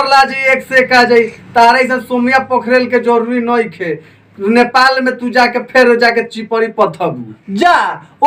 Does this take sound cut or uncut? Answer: uncut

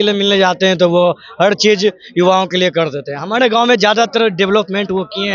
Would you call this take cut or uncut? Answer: uncut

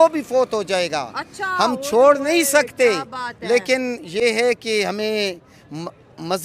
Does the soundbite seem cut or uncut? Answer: uncut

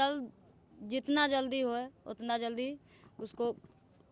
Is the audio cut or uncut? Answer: uncut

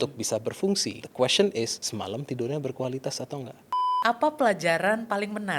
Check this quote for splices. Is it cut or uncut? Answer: cut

